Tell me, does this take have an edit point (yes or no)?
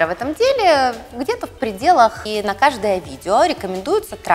yes